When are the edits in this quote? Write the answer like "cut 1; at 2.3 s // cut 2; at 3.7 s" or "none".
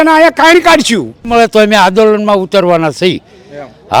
cut 1; at 1.2 s